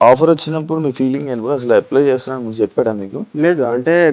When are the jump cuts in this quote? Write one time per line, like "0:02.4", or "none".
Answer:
0:03.2